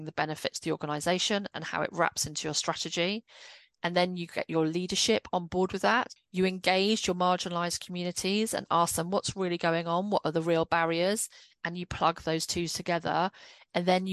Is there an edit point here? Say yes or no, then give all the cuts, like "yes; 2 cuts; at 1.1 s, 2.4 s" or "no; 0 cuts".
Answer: yes; 1 cut; at 6.2 s